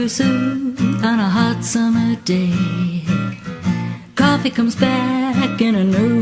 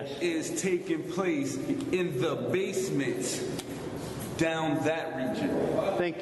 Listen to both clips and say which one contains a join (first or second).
second